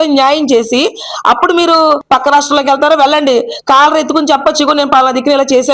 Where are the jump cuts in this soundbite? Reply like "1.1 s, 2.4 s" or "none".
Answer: 2.0 s